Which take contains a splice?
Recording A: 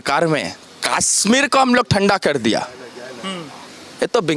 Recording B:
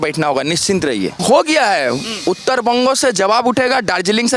B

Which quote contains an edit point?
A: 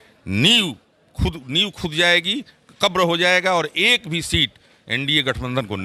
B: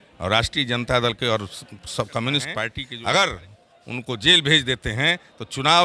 B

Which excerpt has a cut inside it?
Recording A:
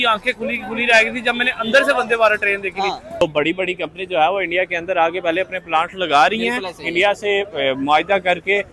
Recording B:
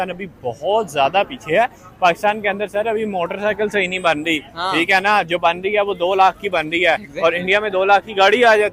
A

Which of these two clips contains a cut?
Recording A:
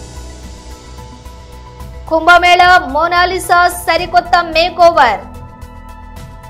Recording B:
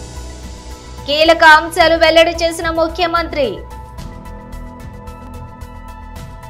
B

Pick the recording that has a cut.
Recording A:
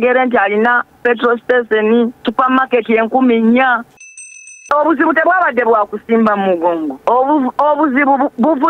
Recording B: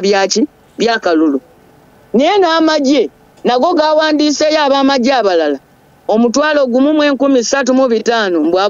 A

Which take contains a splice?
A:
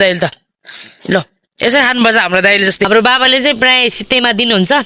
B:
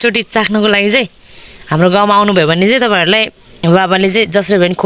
A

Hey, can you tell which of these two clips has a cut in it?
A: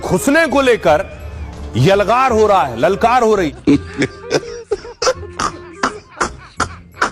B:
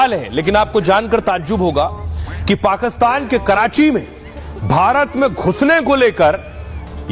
A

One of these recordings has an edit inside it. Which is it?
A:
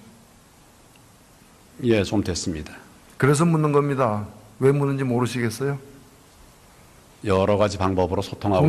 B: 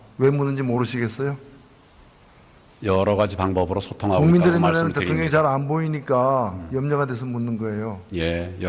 A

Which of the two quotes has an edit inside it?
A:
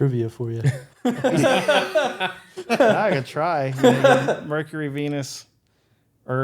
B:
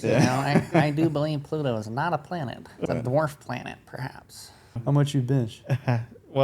B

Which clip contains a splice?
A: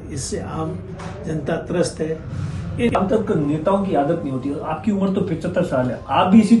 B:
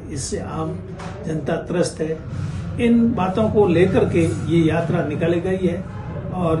A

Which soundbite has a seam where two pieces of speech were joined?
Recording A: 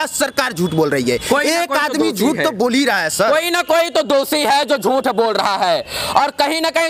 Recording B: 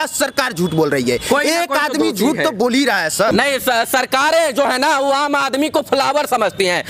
B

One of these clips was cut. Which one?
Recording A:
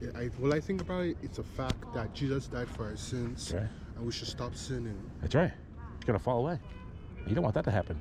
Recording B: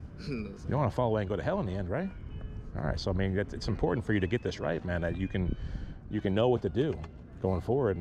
A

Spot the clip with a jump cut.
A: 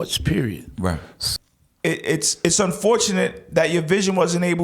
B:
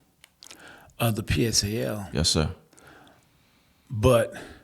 A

